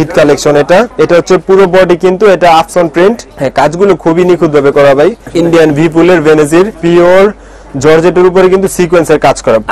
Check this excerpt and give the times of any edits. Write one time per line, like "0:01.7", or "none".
0:00.9
0:03.3
0:05.2
0:06.8